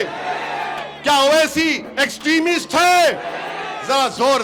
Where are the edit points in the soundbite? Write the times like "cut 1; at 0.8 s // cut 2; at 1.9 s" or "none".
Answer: none